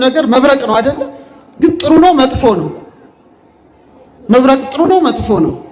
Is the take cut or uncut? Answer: uncut